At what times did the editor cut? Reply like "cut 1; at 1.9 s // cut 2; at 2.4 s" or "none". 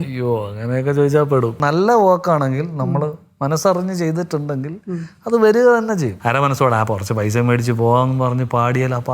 cut 1; at 1.6 s // cut 2; at 6.1 s